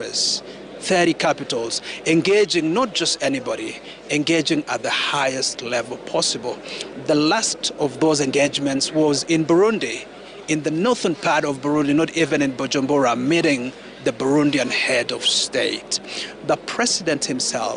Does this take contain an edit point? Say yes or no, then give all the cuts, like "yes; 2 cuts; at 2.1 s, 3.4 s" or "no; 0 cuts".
no; 0 cuts